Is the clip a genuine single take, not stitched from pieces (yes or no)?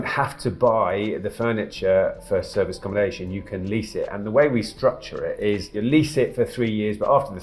yes